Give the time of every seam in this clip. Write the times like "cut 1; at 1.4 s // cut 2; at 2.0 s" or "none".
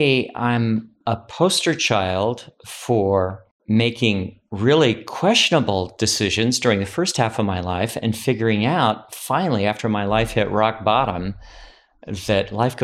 cut 1; at 0.9 s // cut 2; at 3.5 s